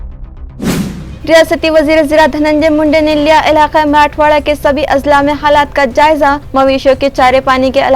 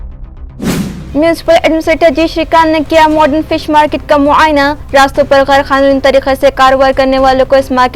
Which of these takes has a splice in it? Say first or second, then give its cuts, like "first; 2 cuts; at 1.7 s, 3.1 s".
second; 1 cut; at 1.0 s